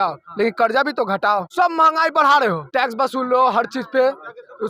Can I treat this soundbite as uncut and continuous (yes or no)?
yes